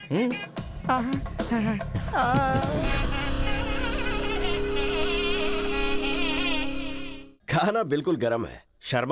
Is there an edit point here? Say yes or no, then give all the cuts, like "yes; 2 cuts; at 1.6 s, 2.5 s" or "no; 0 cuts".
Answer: yes; 2 cuts; at 2.9 s, 7.2 s